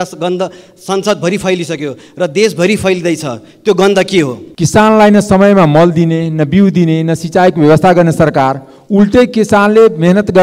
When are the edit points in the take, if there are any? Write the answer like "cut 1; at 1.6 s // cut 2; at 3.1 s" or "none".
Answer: cut 1; at 4.4 s